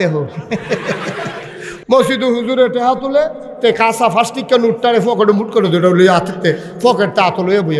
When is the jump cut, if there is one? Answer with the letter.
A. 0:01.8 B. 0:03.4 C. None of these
A